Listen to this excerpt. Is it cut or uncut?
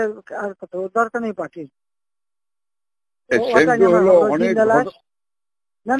uncut